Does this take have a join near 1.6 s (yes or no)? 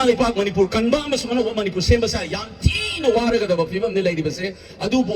no